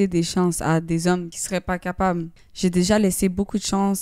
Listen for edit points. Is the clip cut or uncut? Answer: cut